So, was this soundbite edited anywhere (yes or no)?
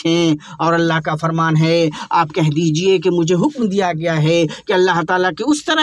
no